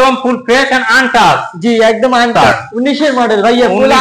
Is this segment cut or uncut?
cut